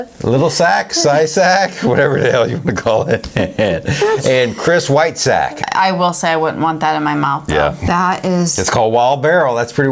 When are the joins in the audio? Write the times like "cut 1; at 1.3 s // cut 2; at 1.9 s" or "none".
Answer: cut 1; at 5.6 s // cut 2; at 7.8 s